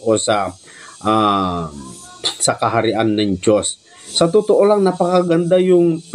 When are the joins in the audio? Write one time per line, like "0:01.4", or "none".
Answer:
0:04.0

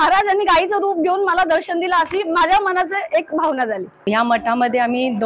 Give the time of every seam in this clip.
0:04.1

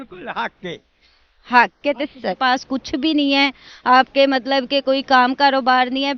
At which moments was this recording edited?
0:02.4

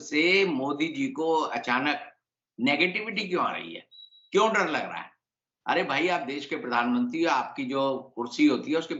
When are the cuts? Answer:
none

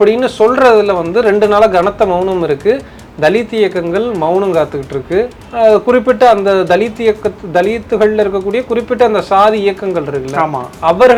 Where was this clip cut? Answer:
none

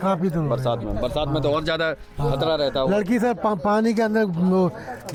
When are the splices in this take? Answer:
none

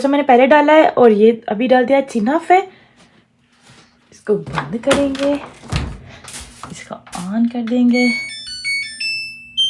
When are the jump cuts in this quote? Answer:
none

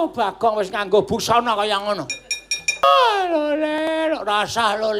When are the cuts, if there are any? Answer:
0:02.8

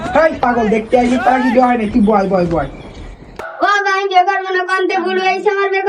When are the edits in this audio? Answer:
0:03.4

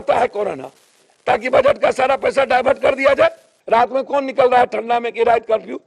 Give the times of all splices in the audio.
0:03.5

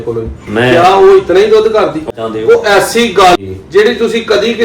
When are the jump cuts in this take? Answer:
0:02.0
0:03.4

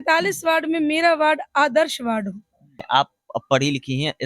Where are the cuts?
0:02.8

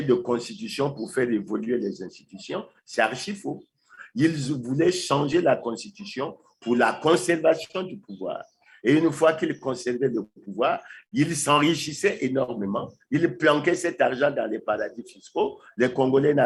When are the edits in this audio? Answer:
none

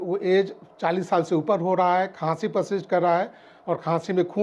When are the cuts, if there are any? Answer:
none

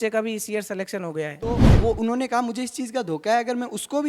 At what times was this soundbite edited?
0:01.7

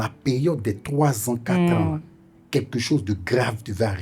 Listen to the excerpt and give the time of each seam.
none

